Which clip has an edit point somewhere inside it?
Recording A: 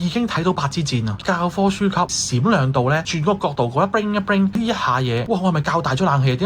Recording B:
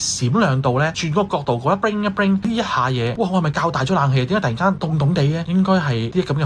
A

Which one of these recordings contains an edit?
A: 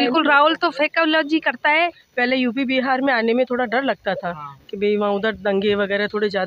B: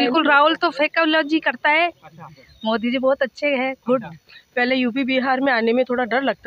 A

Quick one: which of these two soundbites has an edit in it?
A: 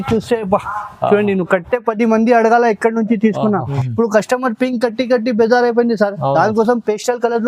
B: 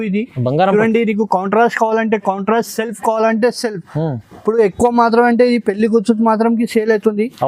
A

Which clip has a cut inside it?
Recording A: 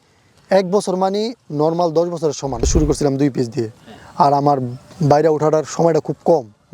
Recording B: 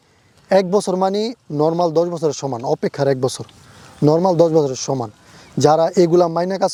A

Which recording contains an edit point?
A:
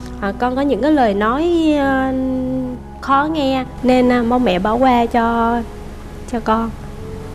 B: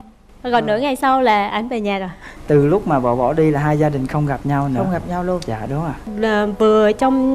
B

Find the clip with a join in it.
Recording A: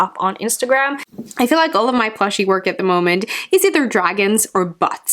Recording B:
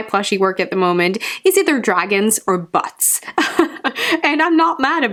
A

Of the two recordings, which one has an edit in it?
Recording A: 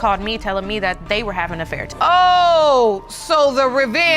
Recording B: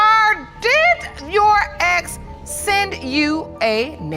A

